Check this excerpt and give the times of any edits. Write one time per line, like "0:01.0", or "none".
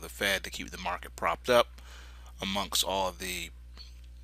0:02.5